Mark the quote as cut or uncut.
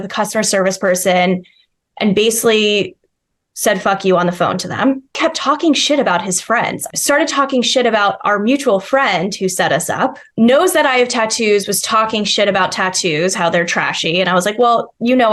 cut